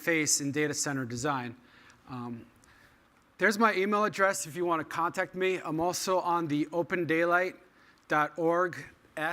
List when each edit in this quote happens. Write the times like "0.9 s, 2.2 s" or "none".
3.3 s

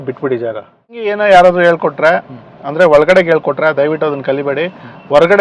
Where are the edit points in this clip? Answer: 1.1 s

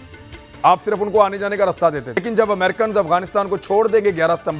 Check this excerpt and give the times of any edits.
2.2 s

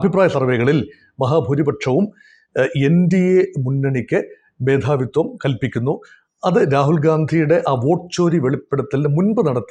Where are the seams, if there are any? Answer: none

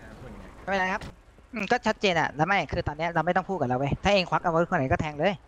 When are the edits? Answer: 1.1 s

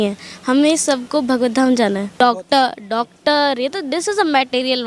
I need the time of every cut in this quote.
2.1 s

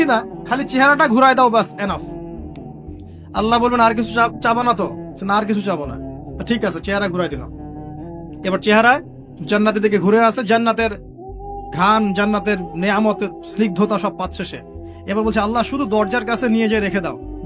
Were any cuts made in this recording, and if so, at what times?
none

